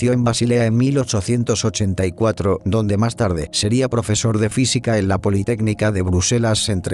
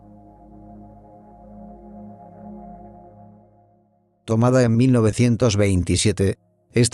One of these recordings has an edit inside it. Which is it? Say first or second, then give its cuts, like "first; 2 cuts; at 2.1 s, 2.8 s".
first; 1 cut; at 4.0 s